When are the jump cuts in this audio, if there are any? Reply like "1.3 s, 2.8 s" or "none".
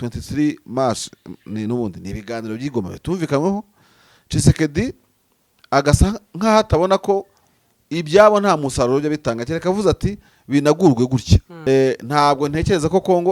11.5 s